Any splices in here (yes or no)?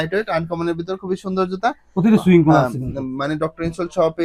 no